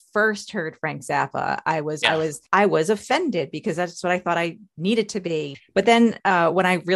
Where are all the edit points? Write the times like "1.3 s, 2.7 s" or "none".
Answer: 2.0 s, 5.6 s